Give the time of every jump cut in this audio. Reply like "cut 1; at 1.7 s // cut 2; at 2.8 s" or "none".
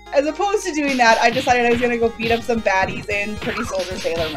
cut 1; at 1.8 s